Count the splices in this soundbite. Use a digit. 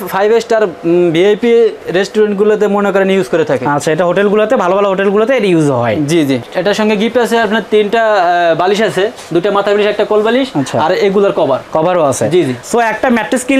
1